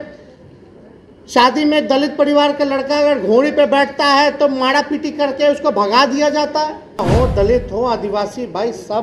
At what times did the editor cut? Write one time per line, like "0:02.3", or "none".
0:07.0

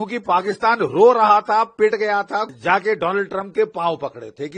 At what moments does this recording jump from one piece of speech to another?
0:02.5

